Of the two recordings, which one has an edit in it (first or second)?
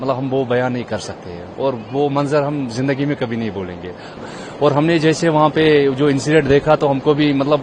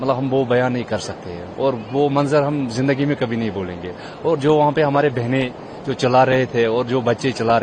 first